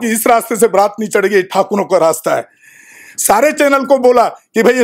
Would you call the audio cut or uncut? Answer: uncut